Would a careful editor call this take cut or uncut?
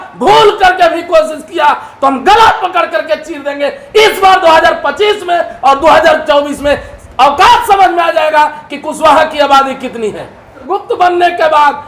cut